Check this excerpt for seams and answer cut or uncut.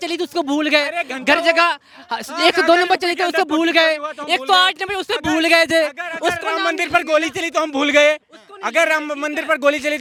uncut